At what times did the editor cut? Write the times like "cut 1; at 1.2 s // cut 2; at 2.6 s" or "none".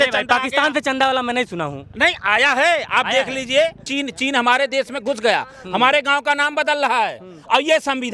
cut 1; at 3.9 s